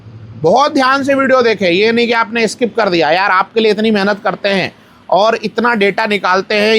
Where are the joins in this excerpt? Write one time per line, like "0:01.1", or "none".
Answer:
none